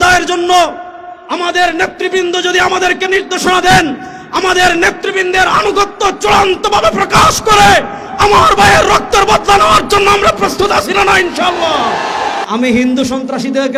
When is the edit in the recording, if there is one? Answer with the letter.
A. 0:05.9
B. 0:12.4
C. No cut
B